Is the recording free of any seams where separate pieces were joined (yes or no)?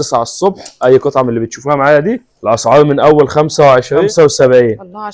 no